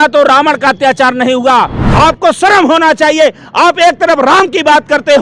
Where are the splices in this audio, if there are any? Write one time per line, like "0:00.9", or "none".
0:01.8